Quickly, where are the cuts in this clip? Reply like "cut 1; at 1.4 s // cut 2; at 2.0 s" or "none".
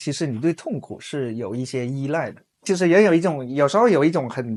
none